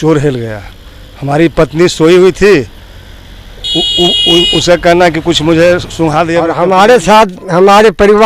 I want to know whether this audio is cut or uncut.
cut